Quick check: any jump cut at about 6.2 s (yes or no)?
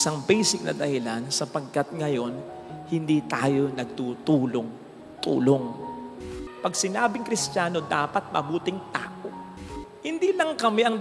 yes